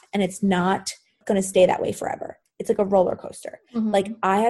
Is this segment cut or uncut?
cut